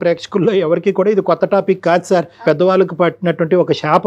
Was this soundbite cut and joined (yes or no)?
yes